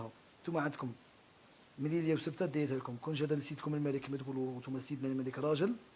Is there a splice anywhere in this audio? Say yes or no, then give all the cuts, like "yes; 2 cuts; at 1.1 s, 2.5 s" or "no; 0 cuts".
no; 0 cuts